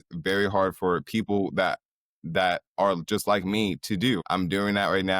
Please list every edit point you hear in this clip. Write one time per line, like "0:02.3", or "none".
0:04.2